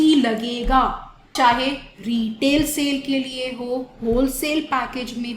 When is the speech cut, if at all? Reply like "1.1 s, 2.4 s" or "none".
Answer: 1.3 s